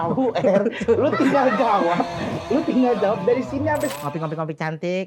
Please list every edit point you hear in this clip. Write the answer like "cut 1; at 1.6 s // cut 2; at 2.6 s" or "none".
cut 1; at 3.9 s